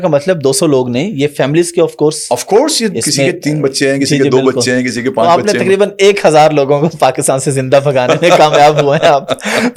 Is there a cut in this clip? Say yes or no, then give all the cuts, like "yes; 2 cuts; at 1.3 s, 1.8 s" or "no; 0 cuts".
no; 0 cuts